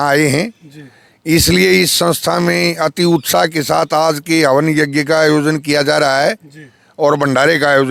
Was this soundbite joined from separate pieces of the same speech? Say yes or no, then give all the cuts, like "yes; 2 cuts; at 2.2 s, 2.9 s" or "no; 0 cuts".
no; 0 cuts